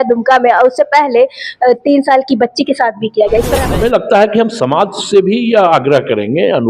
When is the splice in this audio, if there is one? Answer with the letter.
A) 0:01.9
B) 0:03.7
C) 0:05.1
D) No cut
B